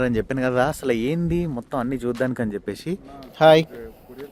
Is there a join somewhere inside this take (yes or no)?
yes